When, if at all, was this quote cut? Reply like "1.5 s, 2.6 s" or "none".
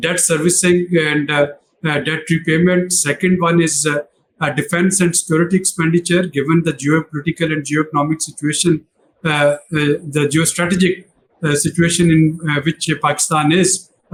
none